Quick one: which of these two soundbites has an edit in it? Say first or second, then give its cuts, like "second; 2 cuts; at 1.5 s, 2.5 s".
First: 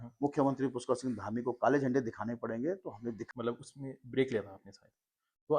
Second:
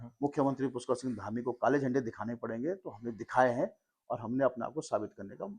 first; 1 cut; at 3.2 s